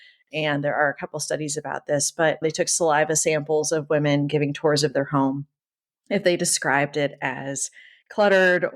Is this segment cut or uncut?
cut